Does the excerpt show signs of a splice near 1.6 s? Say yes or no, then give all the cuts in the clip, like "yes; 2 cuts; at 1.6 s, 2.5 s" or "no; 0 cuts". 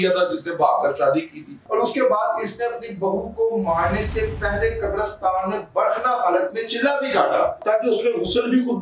yes; 2 cuts; at 1.6 s, 7.6 s